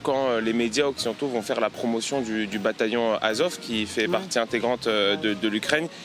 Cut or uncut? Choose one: uncut